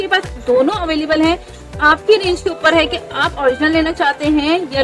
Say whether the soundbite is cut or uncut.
uncut